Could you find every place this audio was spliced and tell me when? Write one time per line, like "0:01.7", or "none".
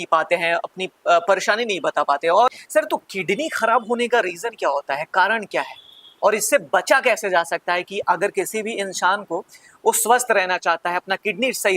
0:02.5